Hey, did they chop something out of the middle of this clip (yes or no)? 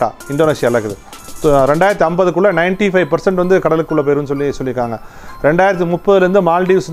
no